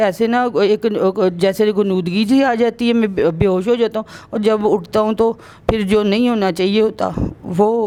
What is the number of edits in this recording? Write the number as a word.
zero